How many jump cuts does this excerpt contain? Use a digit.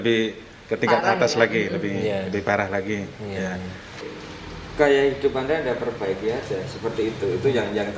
1